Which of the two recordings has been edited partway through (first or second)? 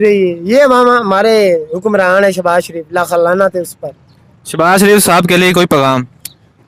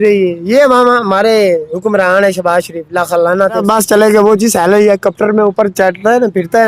second